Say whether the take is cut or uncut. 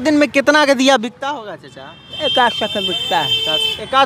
cut